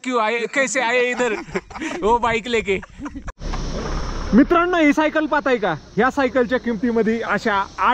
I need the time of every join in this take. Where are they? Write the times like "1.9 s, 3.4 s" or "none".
3.3 s